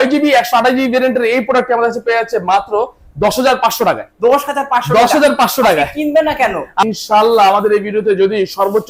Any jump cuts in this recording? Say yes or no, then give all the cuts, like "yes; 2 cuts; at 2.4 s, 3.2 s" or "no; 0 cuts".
yes; 1 cut; at 6.8 s